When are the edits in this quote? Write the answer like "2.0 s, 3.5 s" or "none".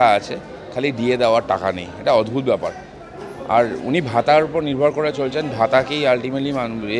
none